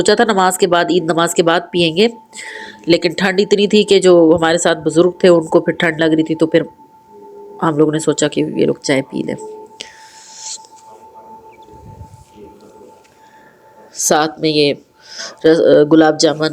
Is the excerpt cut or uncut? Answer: uncut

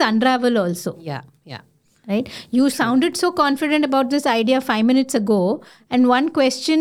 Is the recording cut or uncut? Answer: uncut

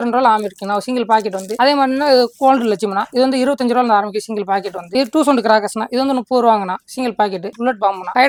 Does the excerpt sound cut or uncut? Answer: uncut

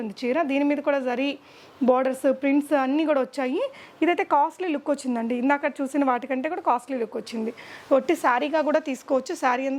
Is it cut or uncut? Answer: uncut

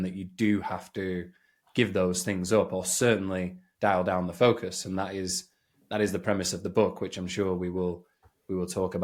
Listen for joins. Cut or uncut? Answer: uncut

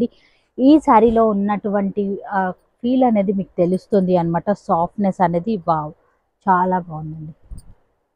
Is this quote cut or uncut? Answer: uncut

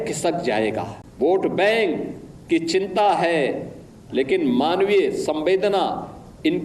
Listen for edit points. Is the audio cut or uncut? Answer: cut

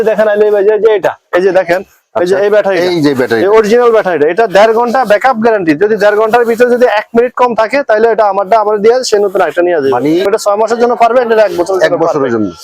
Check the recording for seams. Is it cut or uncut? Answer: cut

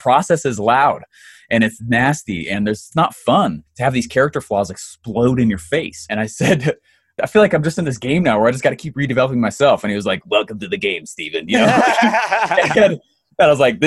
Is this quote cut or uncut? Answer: cut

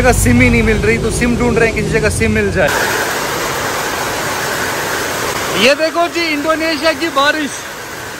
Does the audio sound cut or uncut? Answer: uncut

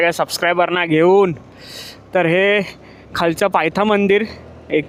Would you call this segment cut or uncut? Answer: uncut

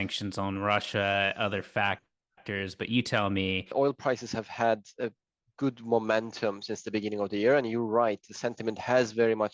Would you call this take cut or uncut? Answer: cut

